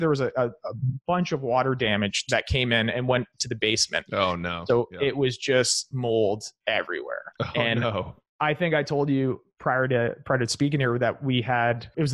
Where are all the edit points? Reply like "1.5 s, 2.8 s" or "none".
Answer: 2.2 s

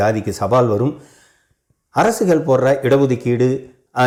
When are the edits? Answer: none

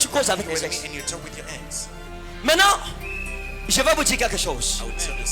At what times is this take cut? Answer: 2.1 s

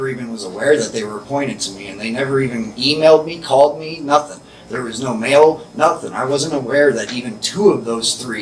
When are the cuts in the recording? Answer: none

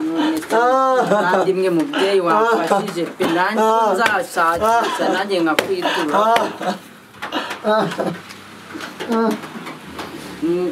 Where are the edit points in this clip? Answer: none

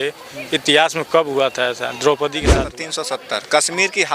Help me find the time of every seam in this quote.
2.7 s

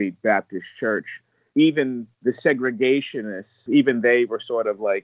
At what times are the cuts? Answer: 1.4 s, 3.6 s

